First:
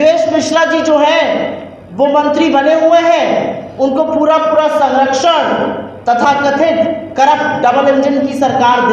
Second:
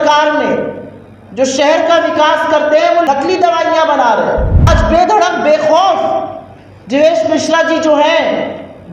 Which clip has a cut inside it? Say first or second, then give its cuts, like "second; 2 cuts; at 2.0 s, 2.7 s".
second; 2 cuts; at 3.0 s, 4.7 s